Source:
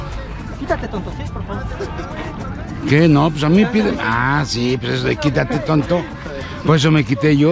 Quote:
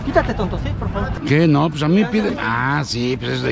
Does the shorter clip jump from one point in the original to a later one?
yes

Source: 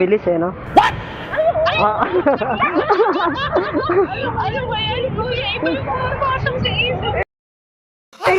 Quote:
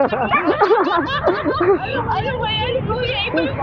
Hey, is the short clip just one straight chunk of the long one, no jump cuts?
yes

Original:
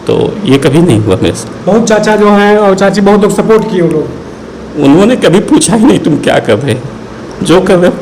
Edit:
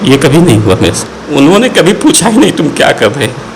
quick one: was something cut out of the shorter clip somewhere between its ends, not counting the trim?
yes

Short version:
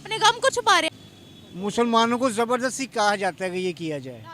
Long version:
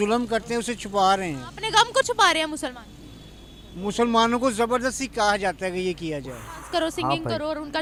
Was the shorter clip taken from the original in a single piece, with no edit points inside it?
no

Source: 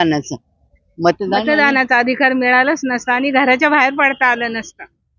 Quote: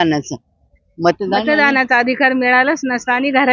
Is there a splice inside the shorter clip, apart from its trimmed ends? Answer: no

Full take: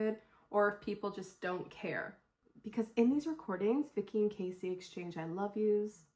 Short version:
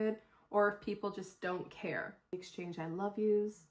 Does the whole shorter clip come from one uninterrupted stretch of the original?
no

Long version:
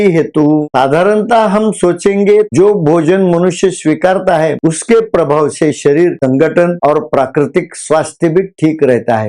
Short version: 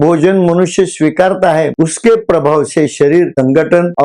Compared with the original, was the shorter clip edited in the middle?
no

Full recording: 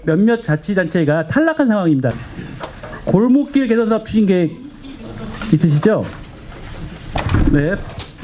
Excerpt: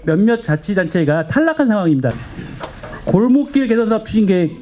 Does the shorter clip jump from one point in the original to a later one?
no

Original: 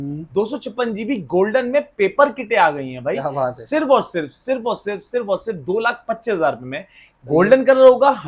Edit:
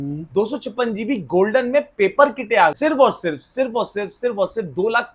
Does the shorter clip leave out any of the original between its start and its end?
yes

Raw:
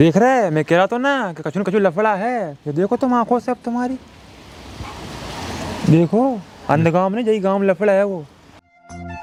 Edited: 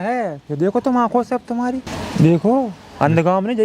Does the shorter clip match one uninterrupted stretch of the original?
no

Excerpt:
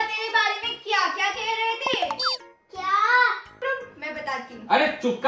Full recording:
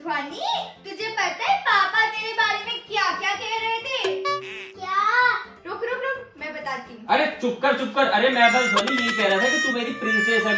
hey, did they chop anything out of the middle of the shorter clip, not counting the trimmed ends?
yes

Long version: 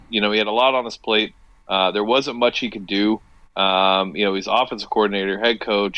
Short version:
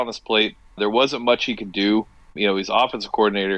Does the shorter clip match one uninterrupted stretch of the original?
no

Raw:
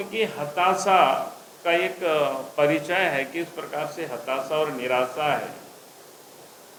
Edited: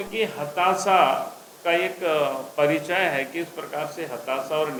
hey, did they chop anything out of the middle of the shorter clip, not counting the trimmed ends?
no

